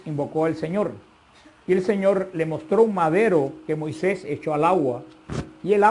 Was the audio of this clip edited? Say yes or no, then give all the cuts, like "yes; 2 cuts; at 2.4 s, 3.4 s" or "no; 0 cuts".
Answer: yes; 1 cut; at 1.0 s